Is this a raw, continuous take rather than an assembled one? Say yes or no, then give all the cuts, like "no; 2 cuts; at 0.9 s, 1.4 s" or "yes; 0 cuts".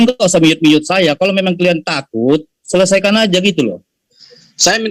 yes; 0 cuts